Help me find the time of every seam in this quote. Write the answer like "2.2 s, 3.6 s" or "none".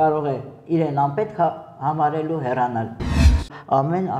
3.1 s